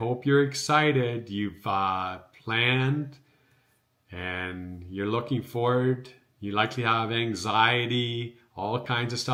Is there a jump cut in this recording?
no; 0 cuts

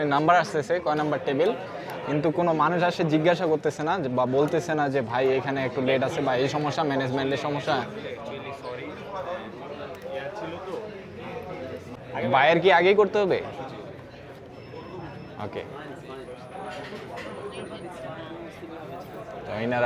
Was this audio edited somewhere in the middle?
yes; 1 cut; at 11.9 s

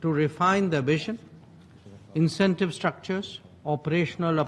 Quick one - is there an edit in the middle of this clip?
no; 0 cuts

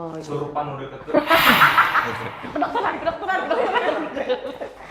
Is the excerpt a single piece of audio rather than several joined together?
yes; 0 cuts

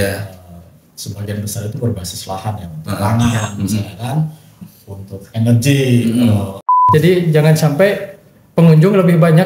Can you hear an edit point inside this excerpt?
yes; 1 cut; at 6.8 s

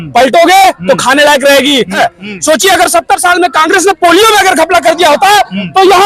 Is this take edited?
yes; 1 cut; at 1.9 s

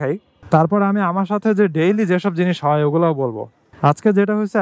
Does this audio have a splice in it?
no; 0 cuts

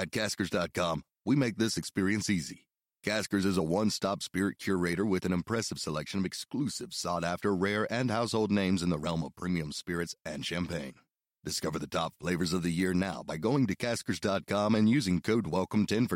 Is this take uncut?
yes; 0 cuts

